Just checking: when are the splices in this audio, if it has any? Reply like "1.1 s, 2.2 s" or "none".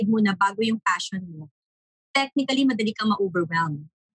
none